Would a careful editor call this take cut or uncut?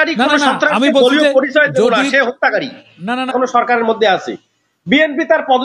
cut